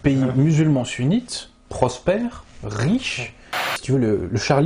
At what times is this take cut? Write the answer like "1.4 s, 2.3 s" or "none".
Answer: 3.8 s